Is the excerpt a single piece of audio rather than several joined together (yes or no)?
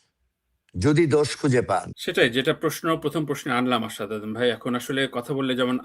yes